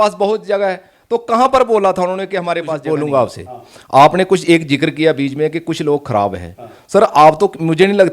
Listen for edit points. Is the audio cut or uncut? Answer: cut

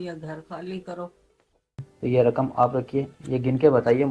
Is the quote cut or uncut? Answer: cut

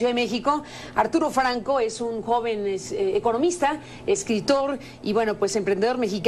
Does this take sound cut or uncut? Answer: cut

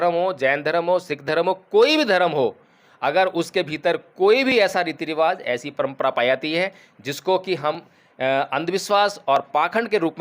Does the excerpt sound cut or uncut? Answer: uncut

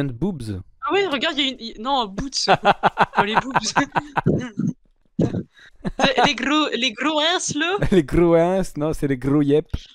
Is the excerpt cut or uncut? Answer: uncut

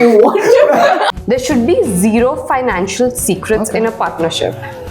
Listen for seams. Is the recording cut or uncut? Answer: cut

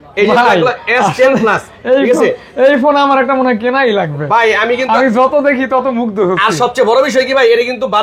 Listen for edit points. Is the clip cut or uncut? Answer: uncut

